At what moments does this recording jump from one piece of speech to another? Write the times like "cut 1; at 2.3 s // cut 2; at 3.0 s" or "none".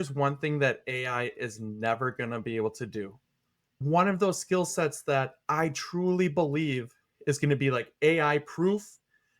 cut 1; at 3.8 s